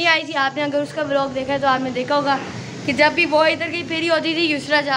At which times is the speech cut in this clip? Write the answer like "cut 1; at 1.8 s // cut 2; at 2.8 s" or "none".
none